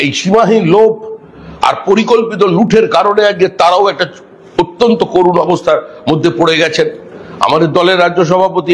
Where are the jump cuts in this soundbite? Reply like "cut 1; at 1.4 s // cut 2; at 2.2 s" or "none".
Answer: none